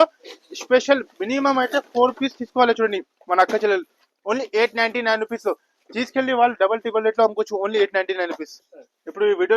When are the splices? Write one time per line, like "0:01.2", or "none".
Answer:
none